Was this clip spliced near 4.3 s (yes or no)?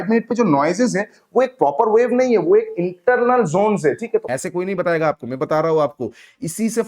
yes